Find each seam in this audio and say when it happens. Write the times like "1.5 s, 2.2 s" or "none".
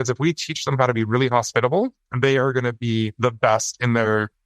2.0 s, 3.1 s